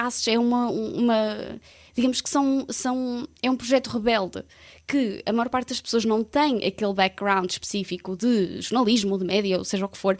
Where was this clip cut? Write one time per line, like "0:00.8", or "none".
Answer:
none

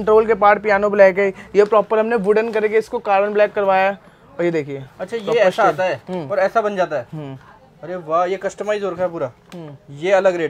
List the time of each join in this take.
none

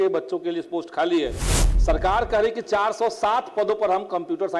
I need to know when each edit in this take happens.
0:01.7

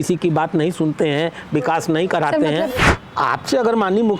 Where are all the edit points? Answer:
0:02.7

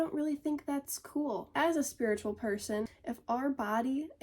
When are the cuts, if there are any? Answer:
0:01.5
0:02.9

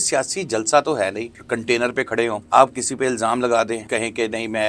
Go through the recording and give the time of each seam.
0:01.4
0:02.4
0:03.8

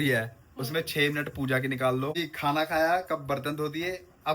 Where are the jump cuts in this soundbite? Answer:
0:02.3

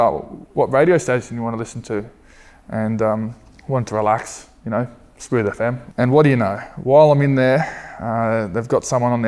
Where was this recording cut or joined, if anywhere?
0:05.8

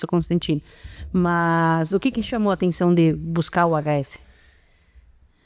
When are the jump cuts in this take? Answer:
none

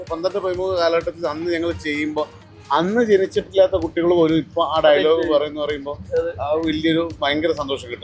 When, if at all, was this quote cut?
none

